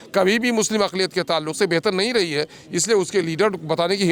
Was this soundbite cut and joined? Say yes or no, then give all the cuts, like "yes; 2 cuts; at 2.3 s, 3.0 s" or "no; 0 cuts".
no; 0 cuts